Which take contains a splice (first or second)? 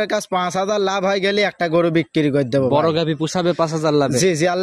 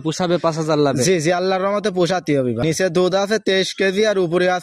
second